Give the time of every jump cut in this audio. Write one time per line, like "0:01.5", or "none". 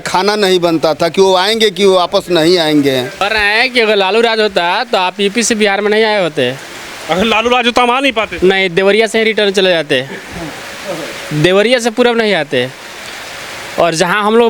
0:03.1